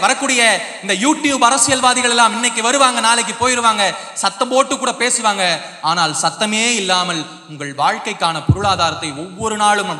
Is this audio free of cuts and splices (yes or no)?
yes